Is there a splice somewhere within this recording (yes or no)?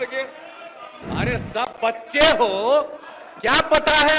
yes